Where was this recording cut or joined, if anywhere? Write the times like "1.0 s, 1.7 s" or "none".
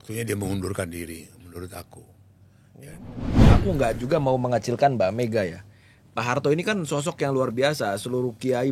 3.5 s